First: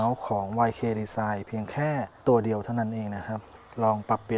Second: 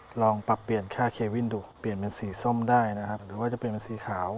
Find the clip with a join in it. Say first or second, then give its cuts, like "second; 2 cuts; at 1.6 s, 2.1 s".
second; 2 cuts; at 1.7 s, 3.3 s